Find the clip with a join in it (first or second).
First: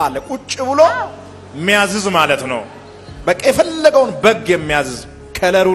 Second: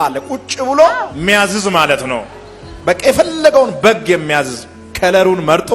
second